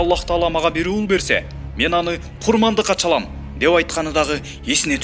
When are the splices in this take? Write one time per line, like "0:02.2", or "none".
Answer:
none

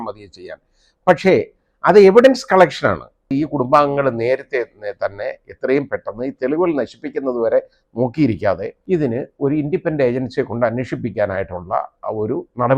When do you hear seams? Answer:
0:03.3
0:08.7
0:12.0

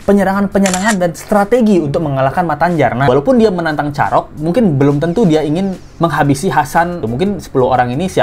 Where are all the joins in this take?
0:03.1
0:05.8
0:07.0

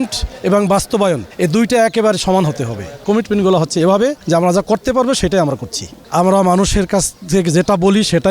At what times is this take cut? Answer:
0:01.3
0:03.0
0:04.2
0:06.0

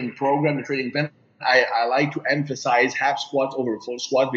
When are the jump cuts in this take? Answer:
none

